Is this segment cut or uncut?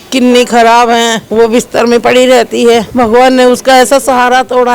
cut